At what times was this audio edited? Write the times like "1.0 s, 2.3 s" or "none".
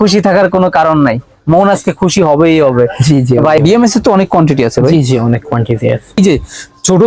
3.6 s, 6.2 s